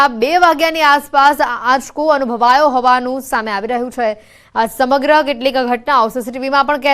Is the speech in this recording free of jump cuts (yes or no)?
no